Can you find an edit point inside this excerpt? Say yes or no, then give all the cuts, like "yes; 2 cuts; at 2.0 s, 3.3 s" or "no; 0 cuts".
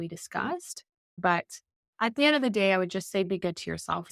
yes; 1 cut; at 1.2 s